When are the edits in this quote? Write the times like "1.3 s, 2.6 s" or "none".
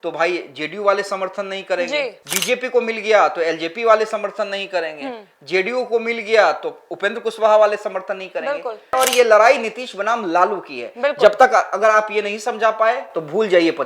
2.3 s, 9.0 s